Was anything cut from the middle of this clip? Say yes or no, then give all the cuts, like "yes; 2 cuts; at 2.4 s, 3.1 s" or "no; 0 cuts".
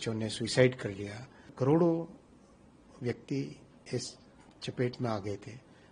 yes; 1 cut; at 1.4 s